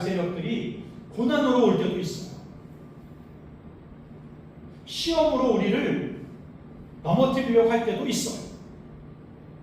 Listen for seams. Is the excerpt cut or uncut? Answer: uncut